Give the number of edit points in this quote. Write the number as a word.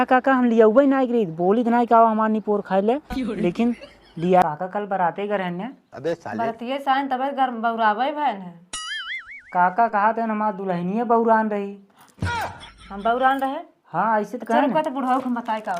one